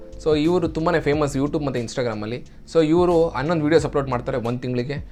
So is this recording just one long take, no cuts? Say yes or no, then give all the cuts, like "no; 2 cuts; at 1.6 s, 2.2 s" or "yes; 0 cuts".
yes; 0 cuts